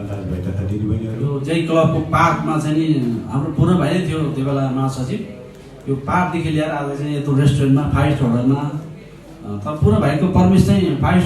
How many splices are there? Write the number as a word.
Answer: one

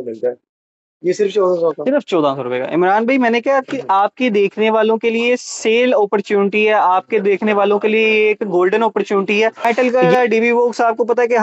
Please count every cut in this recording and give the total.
one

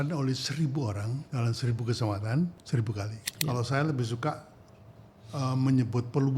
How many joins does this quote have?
two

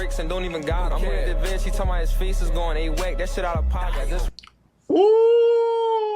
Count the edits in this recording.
one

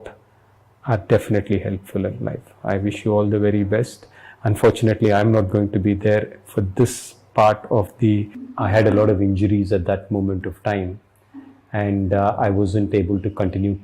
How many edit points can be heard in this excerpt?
one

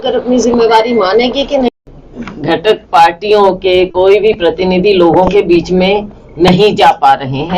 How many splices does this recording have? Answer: one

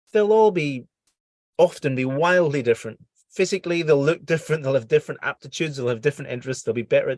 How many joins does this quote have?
zero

